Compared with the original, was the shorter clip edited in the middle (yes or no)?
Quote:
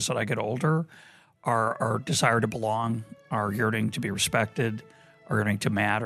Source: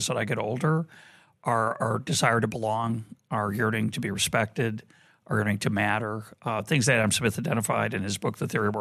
no